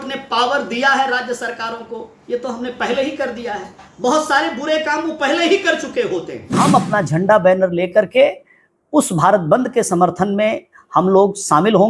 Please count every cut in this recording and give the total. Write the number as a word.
one